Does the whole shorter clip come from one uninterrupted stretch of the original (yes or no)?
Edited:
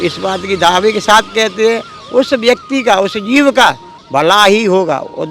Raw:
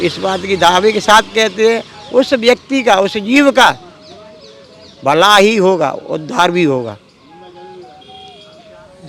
no